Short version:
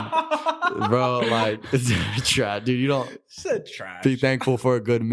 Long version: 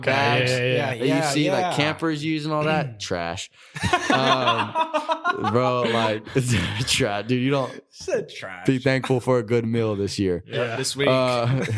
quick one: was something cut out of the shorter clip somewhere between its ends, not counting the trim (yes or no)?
no